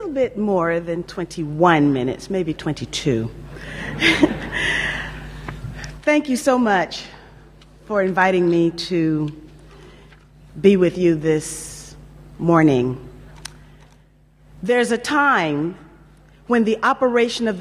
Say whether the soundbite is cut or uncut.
cut